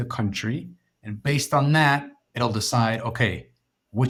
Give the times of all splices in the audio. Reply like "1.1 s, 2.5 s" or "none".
none